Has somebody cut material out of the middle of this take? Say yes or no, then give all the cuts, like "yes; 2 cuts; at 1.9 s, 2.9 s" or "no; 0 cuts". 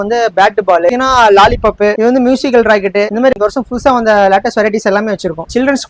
yes; 2 cuts; at 0.9 s, 3.3 s